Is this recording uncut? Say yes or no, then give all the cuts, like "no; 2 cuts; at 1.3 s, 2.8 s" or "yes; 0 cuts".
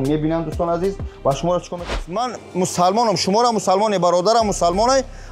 no; 1 cut; at 2.0 s